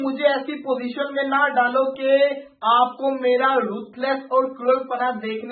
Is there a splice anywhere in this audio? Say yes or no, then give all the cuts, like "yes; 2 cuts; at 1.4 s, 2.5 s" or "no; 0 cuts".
no; 0 cuts